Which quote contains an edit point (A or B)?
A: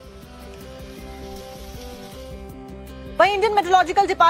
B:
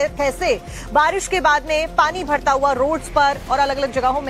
B